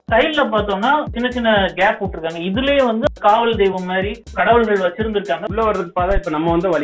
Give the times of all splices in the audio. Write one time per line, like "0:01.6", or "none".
0:05.4